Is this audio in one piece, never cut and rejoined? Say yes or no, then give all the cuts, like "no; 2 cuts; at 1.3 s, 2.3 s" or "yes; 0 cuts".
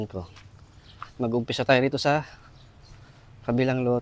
yes; 0 cuts